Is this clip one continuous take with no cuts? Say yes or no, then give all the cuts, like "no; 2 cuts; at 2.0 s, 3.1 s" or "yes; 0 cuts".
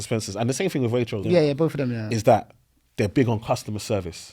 no; 1 cut; at 1.2 s